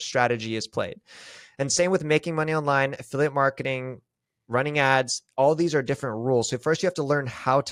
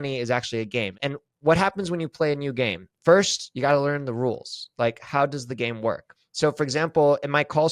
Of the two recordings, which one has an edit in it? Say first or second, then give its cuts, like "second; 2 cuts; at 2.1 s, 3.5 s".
second; 3 cuts; at 0.9 s, 2.9 s, 6.1 s